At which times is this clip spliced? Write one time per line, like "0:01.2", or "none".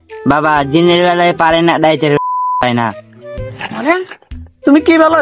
none